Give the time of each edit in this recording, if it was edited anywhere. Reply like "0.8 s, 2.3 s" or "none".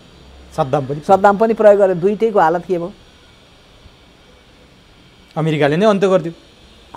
none